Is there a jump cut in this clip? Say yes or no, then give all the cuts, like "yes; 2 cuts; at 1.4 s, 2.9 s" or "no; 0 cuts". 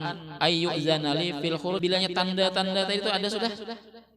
yes; 1 cut; at 1.8 s